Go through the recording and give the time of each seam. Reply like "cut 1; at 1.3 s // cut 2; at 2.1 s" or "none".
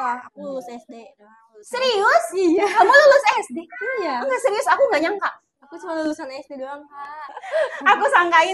cut 1; at 7.3 s